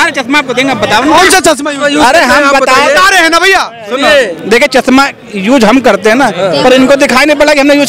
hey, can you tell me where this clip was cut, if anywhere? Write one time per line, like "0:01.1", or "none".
none